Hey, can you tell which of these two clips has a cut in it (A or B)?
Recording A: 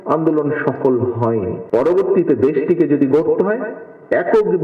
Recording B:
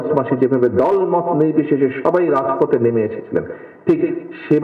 A